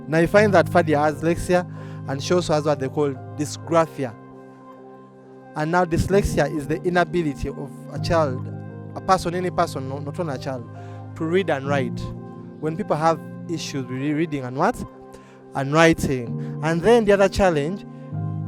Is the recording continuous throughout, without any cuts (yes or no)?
no